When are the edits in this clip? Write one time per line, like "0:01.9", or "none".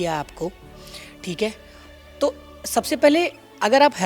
none